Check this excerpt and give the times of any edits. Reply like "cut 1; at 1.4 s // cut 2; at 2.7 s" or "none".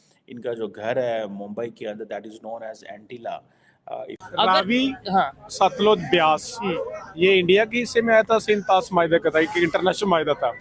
cut 1; at 4.2 s